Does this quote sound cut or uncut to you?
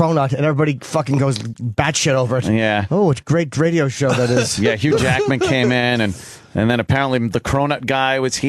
cut